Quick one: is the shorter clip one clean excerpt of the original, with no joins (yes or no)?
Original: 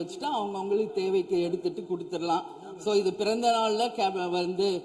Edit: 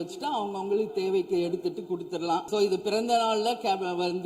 no